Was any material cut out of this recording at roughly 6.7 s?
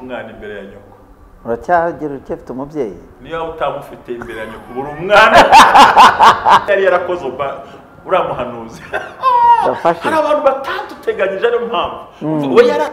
yes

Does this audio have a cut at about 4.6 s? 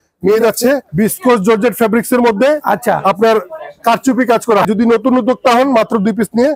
yes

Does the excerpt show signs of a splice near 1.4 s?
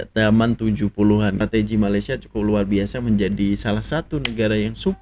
yes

